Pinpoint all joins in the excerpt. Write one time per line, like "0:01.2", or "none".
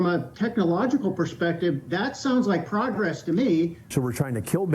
0:03.8